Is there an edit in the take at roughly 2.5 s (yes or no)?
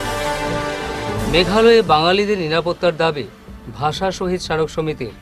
no